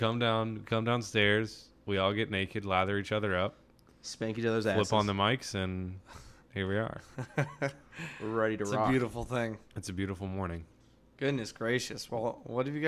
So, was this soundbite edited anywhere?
no; 0 cuts

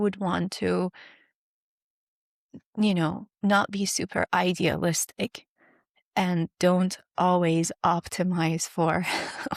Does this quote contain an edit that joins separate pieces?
no; 0 cuts

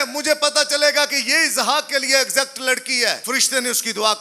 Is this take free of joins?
no; 1 cut; at 3.2 s

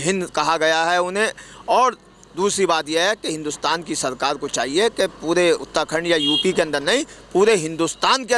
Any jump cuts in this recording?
no; 0 cuts

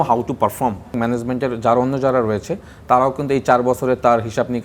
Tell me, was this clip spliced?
yes; 1 cut; at 0.9 s

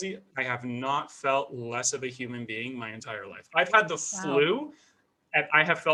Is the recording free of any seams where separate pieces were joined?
yes; 0 cuts

